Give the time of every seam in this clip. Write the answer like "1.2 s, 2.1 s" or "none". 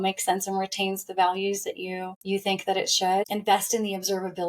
2.1 s, 3.3 s